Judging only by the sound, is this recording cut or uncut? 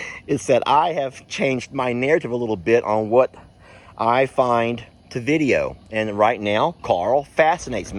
uncut